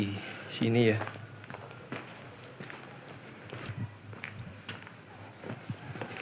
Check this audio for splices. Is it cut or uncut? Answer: uncut